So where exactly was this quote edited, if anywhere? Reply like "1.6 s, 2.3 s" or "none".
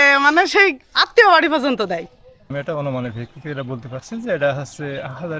2.5 s